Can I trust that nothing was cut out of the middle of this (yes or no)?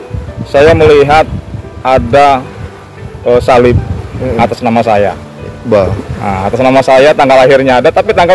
yes